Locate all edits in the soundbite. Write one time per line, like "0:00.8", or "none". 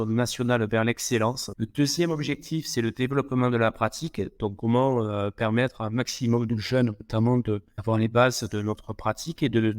0:01.5
0:07.7